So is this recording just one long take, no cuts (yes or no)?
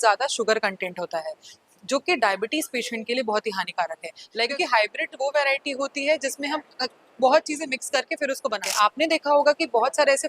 no